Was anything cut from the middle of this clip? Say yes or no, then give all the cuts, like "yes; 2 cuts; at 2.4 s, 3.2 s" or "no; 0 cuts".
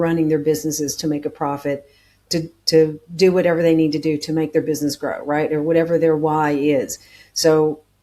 no; 0 cuts